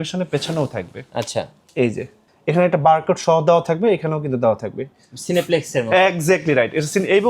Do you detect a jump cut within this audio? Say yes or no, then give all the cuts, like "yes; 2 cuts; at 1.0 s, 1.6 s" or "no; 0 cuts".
yes; 1 cut; at 5.1 s